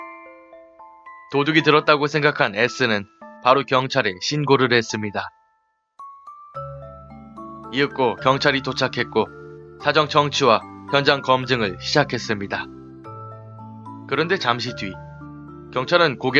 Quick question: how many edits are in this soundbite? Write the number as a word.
zero